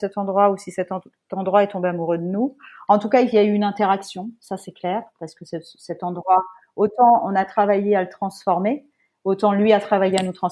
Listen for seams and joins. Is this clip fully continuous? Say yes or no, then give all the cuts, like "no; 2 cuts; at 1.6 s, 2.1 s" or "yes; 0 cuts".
yes; 0 cuts